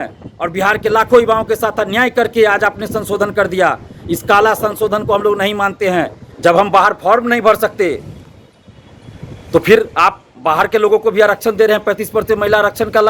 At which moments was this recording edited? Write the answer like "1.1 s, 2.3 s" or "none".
6.2 s